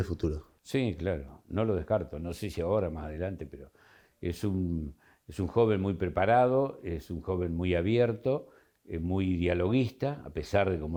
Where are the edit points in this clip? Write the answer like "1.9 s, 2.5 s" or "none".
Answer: none